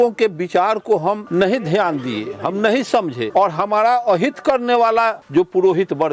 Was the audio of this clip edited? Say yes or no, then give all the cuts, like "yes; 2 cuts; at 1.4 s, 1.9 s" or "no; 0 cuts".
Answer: yes; 3 cuts; at 1.2 s, 3.2 s, 5.2 s